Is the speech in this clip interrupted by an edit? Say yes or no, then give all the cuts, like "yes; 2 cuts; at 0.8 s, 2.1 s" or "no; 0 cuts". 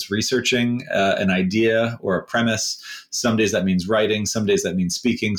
no; 0 cuts